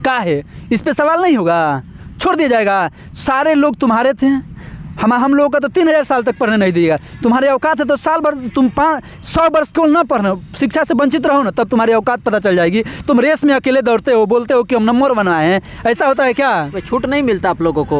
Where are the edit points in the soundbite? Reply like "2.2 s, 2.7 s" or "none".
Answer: none